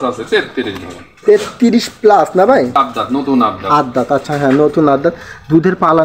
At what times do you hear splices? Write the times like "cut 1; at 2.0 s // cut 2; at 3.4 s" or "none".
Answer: cut 1; at 2.7 s